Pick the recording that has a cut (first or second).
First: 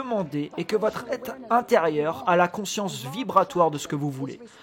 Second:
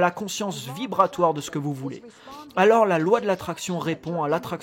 first